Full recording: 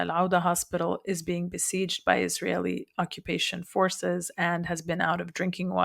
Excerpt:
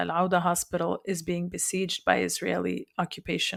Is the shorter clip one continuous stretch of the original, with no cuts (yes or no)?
yes